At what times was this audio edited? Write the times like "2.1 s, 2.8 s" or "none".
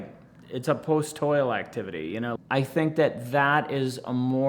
2.3 s